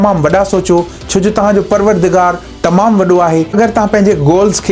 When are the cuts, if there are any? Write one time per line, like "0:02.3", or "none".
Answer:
0:03.5

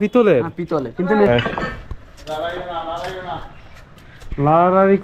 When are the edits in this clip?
0:01.3

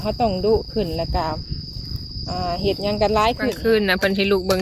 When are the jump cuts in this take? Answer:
0:03.6

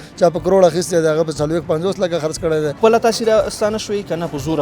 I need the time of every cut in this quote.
0:02.7

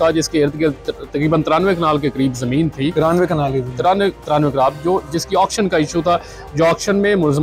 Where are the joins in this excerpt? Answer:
none

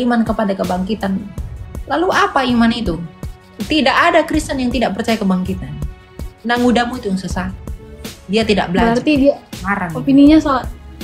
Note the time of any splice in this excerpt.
none

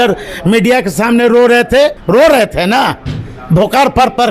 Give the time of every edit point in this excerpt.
0:02.0

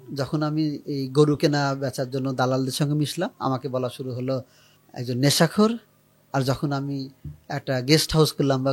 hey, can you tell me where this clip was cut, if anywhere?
none

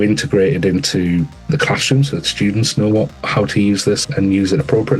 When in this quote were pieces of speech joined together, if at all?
0:01.4
0:04.0

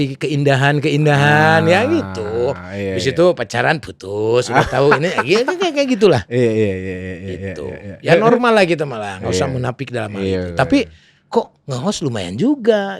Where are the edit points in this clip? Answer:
none

